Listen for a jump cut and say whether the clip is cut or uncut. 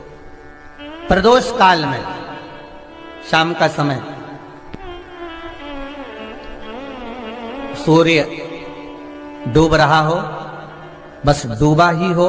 uncut